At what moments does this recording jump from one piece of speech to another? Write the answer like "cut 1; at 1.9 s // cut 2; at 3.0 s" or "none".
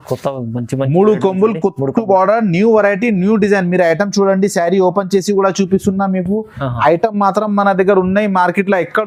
none